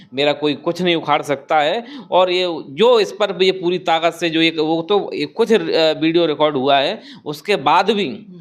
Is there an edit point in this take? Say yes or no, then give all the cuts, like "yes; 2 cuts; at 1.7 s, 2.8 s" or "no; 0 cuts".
no; 0 cuts